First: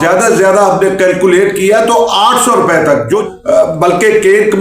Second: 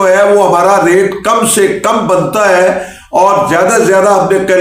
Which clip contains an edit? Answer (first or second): first